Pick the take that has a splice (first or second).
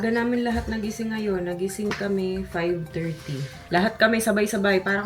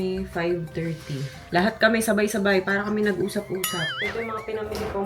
second